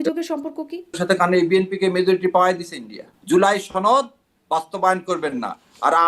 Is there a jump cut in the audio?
yes; 2 cuts; at 1.0 s, 3.1 s

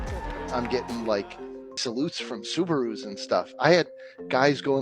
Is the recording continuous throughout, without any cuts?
no; 1 cut; at 1.7 s

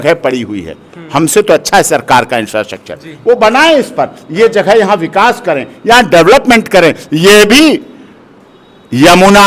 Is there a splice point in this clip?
no; 0 cuts

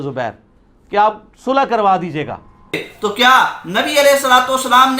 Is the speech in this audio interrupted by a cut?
yes; 1 cut; at 2.9 s

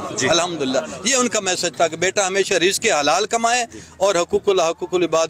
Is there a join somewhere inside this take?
no; 0 cuts

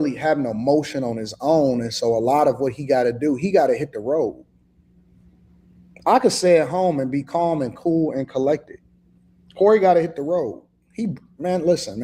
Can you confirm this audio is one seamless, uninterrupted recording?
yes; 0 cuts

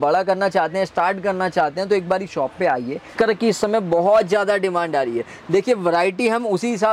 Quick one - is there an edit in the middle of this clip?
yes; 1 cut; at 3.1 s

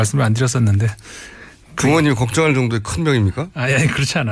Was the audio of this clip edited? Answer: yes; 1 cut; at 2.6 s

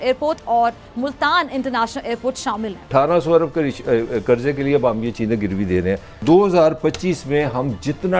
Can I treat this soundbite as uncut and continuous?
no; 2 cuts; at 2.9 s, 6.2 s

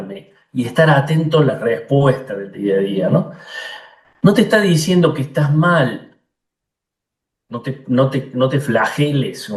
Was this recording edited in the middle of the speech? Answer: no; 0 cuts

